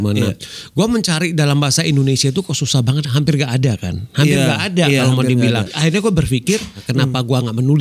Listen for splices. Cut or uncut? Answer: cut